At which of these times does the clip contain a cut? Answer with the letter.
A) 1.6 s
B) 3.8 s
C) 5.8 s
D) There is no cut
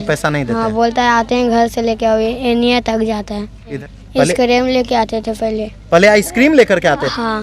B